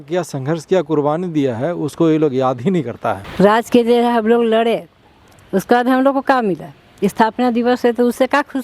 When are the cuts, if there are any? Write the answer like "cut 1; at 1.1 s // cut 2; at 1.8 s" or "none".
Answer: cut 1; at 3.2 s